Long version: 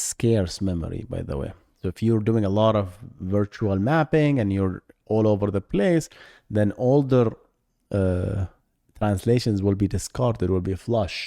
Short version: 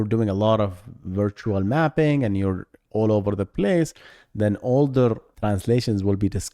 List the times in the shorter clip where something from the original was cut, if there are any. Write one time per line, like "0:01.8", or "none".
0:05.3